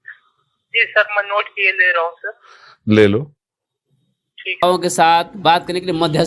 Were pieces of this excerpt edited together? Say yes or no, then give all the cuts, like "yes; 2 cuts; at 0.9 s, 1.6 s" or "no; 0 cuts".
yes; 1 cut; at 4.6 s